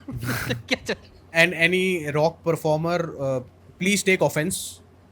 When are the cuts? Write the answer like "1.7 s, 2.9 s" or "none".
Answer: 1.3 s